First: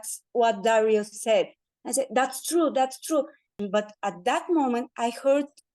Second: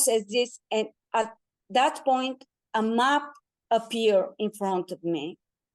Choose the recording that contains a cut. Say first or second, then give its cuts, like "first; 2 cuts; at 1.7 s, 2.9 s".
first; 1 cut; at 3.6 s